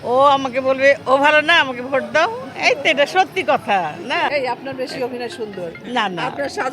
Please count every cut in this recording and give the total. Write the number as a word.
one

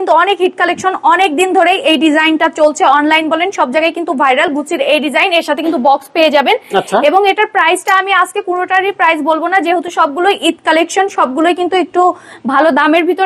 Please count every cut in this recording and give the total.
zero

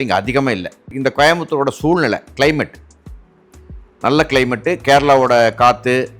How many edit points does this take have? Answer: one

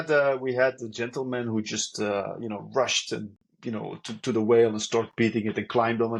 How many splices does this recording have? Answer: zero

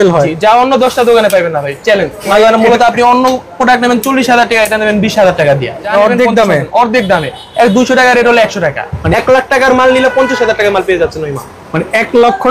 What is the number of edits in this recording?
three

